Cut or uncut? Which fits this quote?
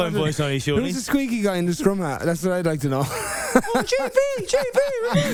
uncut